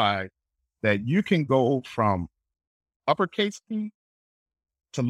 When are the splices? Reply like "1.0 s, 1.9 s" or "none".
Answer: none